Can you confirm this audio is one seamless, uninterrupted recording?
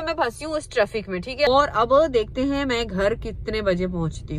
yes; 0 cuts

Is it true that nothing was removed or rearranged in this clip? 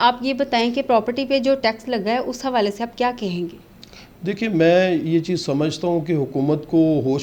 yes; 0 cuts

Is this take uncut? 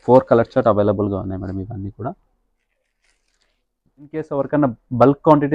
no; 1 cut; at 4.2 s

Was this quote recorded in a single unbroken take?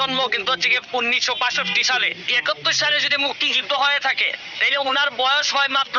no; 1 cut; at 2.3 s

